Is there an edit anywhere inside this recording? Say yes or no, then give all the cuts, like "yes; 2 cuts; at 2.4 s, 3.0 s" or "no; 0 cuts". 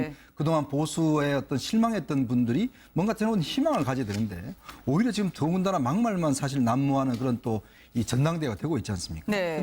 yes; 1 cut; at 8.1 s